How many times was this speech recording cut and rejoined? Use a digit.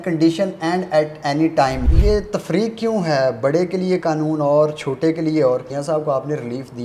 2